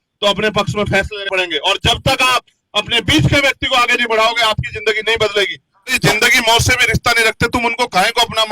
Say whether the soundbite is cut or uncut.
cut